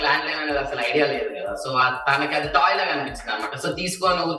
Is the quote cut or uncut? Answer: uncut